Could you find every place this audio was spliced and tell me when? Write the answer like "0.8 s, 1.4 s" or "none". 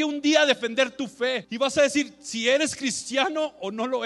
1.5 s

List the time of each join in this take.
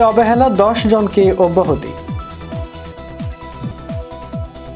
1.9 s

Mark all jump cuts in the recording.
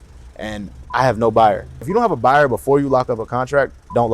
1.8 s

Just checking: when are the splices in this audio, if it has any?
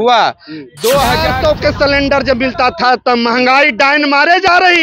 1.3 s

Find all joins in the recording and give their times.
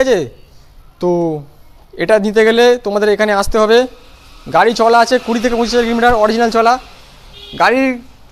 none

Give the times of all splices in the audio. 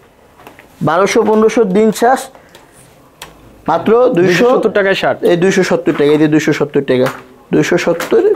none

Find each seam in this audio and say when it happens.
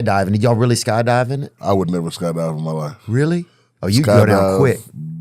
1.5 s

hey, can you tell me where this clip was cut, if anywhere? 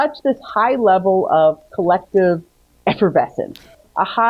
none

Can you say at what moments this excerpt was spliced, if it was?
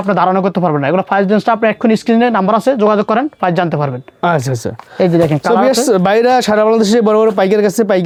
none

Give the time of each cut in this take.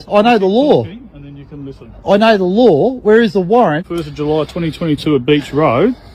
none

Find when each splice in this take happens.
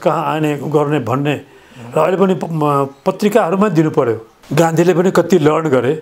4.4 s

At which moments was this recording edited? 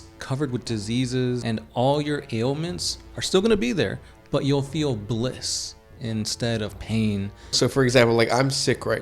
1.4 s, 7.6 s

